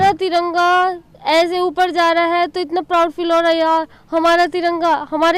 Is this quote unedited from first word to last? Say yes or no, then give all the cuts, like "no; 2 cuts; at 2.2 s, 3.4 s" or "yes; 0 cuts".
yes; 0 cuts